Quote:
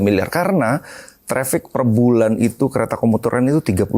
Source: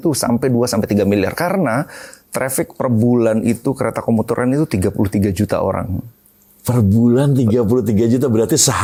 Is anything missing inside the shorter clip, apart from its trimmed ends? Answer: no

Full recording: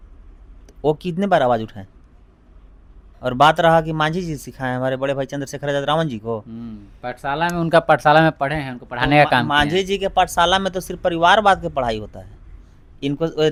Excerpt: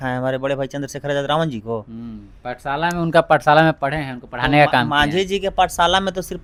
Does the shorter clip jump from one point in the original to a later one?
no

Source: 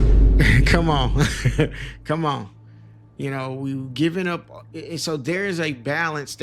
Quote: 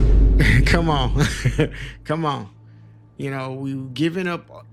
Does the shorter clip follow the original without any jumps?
yes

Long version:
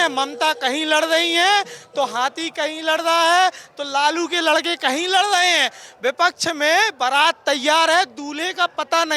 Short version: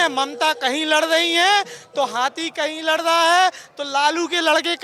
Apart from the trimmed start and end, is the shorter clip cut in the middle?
no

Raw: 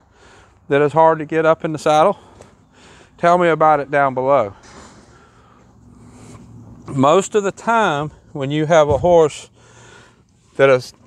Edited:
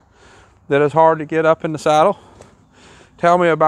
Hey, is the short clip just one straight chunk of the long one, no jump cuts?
yes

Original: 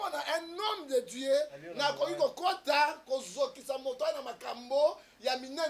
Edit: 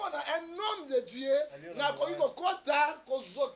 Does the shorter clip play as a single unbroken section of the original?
yes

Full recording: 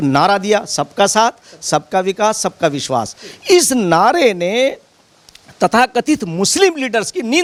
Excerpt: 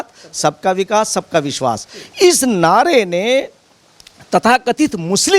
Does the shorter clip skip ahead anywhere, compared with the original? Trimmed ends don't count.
no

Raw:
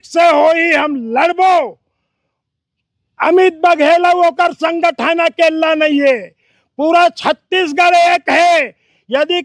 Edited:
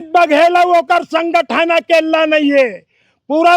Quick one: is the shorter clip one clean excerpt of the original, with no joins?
yes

